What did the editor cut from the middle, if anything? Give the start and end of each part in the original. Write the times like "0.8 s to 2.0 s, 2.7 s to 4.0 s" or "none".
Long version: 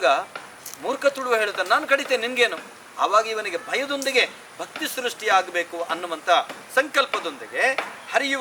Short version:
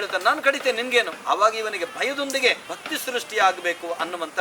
2.6 s to 2.9 s, 4.4 s to 4.6 s